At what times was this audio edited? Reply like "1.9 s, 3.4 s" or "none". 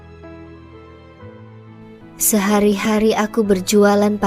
2.2 s